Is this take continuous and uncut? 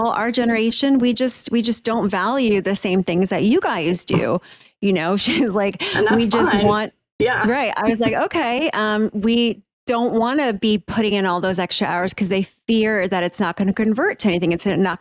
yes; 0 cuts

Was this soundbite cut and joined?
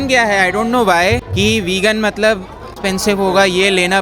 yes; 2 cuts; at 1.3 s, 2.7 s

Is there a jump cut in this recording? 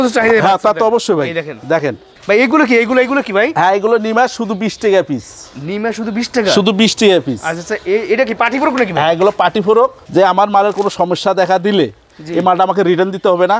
yes; 2 cuts; at 2.1 s, 10.0 s

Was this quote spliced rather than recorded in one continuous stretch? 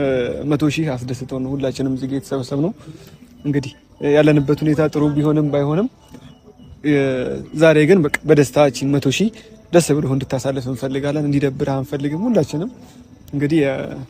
no; 0 cuts

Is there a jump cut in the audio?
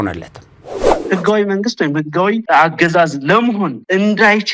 yes; 1 cut; at 1.0 s

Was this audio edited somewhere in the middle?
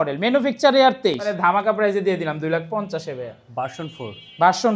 yes; 1 cut; at 1.3 s

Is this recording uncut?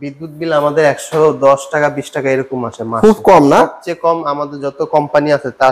yes; 0 cuts

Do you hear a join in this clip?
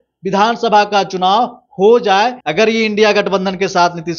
yes; 1 cut; at 2.4 s

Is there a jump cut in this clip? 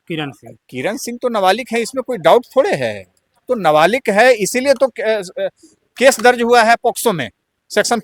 no; 0 cuts

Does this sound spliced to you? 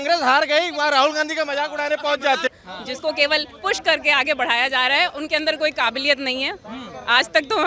yes; 1 cut; at 2.5 s

